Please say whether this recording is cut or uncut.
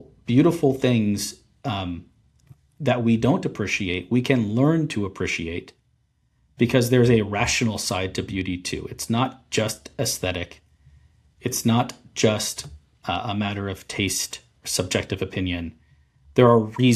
uncut